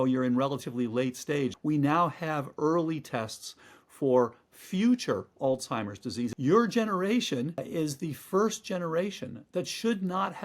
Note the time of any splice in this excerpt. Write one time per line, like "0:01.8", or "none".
0:01.6
0:06.3
0:07.6